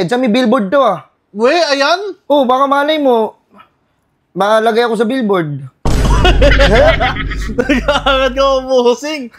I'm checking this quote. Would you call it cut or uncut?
uncut